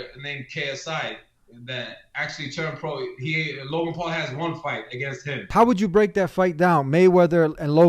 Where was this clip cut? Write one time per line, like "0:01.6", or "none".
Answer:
0:05.5